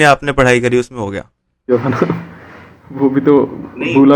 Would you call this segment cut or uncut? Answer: uncut